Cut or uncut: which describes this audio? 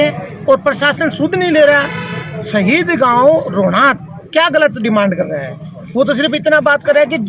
uncut